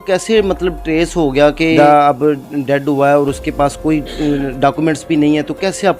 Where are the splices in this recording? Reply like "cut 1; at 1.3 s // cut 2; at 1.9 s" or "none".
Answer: cut 1; at 1.8 s